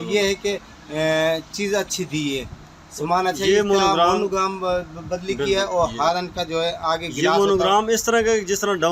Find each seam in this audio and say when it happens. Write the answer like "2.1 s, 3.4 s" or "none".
none